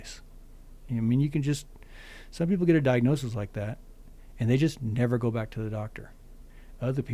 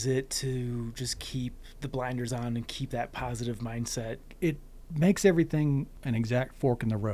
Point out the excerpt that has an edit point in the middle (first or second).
second